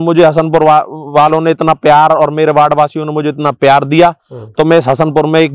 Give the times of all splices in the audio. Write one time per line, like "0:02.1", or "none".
none